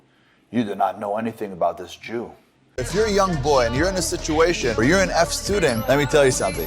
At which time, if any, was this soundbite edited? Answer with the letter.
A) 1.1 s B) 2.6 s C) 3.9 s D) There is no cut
B